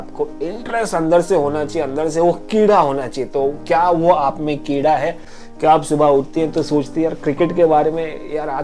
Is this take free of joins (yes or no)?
yes